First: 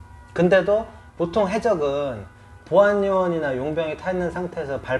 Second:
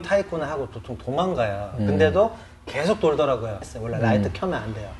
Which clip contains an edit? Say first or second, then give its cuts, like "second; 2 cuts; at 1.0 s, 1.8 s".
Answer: second; 1 cut; at 3.6 s